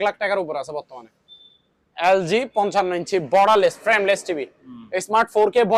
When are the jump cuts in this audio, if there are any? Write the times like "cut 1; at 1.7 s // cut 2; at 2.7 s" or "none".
none